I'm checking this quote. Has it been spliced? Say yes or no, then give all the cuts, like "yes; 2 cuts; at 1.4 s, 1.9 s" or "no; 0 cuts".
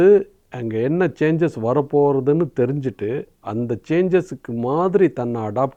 no; 0 cuts